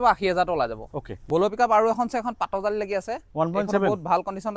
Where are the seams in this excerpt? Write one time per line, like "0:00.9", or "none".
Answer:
0:01.2